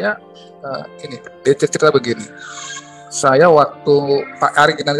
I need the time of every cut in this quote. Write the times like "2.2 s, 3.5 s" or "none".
1.2 s